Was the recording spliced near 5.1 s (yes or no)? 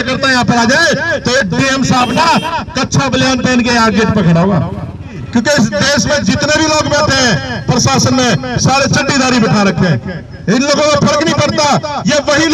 yes